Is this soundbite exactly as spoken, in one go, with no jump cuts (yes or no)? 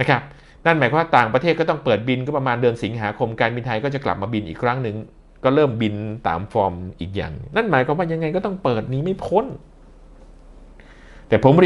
yes